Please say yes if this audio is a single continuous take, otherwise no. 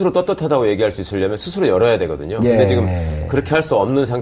yes